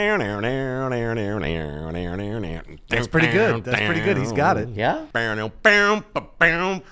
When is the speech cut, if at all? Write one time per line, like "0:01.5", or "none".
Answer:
0:05.1

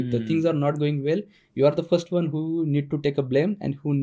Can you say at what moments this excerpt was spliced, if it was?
none

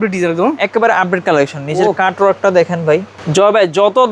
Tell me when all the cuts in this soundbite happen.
0:03.2

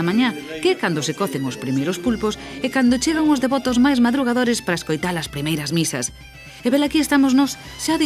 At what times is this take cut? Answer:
0:05.9

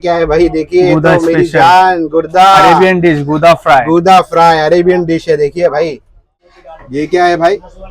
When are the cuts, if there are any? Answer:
0:06.8

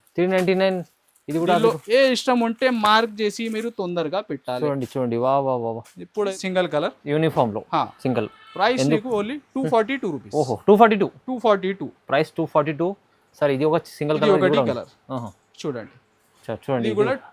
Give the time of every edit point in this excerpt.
0:06.4

